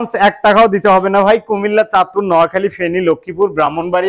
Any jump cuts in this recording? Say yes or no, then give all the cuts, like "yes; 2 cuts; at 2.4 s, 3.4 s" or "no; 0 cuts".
no; 0 cuts